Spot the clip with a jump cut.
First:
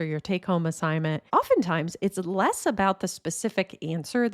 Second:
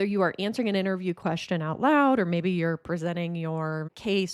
first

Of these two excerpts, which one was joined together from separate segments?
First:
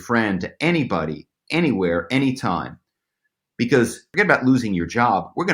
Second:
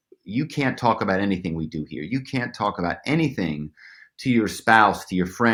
first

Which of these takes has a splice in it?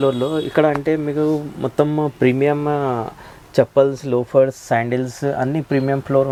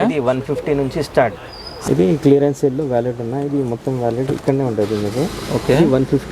second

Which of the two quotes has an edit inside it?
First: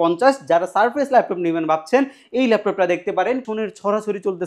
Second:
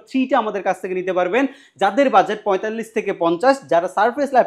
first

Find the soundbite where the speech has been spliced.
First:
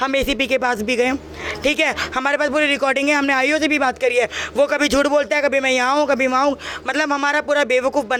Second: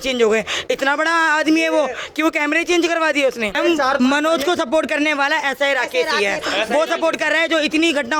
second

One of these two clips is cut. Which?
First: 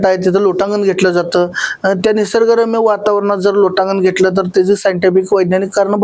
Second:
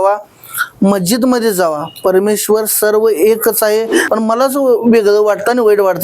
second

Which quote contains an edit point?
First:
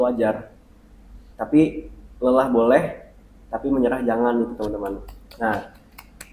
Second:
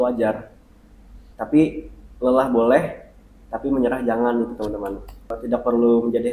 second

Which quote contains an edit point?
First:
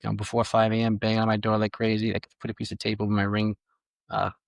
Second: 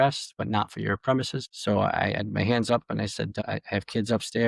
second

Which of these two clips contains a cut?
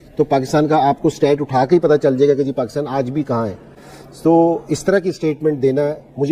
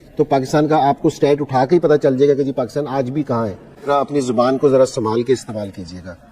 second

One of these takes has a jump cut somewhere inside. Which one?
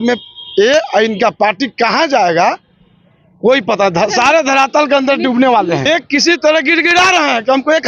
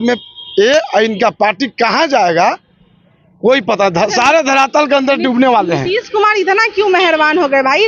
first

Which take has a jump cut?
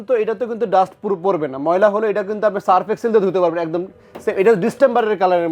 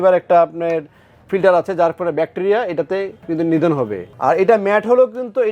second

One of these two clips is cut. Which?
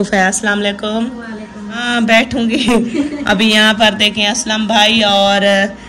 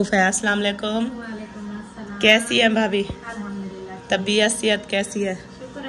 first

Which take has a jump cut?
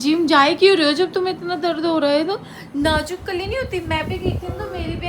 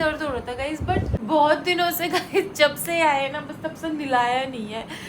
second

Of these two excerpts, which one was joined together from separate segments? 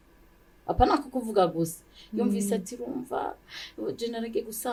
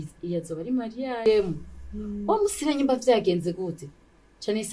second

